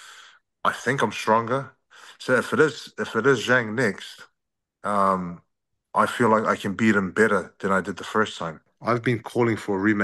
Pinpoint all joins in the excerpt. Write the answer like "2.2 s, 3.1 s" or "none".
8.7 s